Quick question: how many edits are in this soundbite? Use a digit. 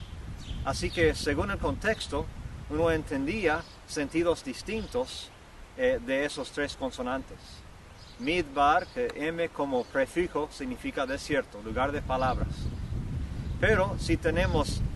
0